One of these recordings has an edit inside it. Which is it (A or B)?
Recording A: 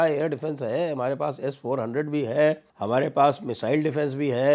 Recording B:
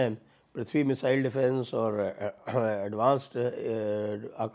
A